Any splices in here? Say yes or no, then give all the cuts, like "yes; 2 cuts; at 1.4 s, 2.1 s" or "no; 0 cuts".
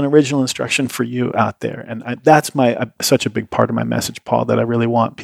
no; 0 cuts